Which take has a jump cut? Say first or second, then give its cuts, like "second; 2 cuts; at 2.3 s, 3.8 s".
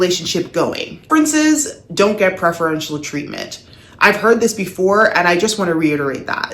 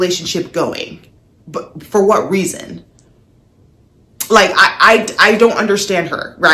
first; 1 cut; at 1.1 s